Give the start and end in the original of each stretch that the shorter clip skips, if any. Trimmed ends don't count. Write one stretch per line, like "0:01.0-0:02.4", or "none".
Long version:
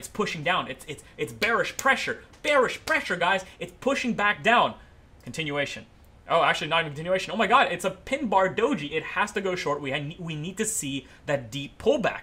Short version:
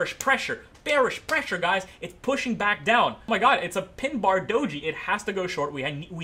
0:04.8-0:07.3